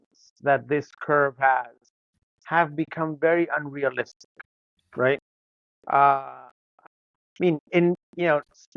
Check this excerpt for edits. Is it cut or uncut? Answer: cut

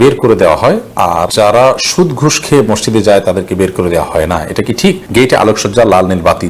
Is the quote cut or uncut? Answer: cut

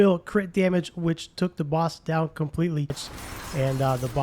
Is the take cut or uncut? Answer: cut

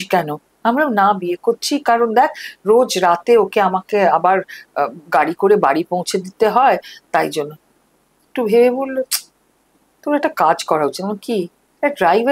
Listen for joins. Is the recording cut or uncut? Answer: uncut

